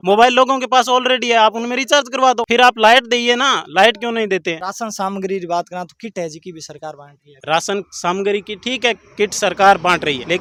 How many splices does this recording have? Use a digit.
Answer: 0